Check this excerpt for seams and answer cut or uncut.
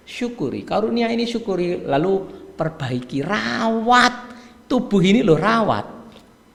uncut